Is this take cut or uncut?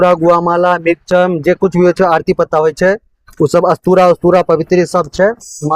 uncut